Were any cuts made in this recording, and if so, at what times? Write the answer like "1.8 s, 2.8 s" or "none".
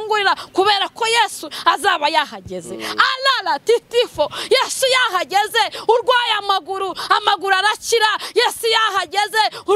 none